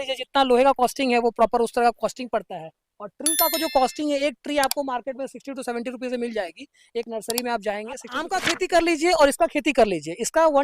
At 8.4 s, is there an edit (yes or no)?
yes